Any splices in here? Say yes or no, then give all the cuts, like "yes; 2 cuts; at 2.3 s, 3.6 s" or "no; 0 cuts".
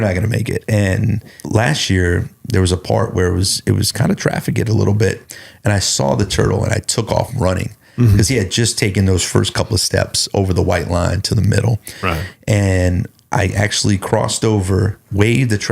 yes; 1 cut; at 1.4 s